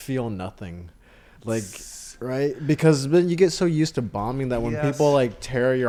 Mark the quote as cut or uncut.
uncut